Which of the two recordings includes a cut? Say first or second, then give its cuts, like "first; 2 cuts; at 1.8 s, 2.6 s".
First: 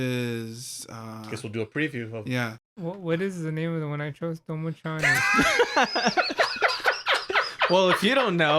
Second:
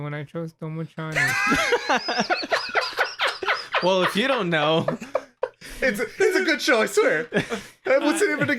first; 1 cut; at 2.6 s